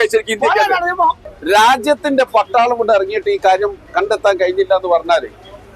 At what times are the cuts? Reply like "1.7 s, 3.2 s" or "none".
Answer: 1.3 s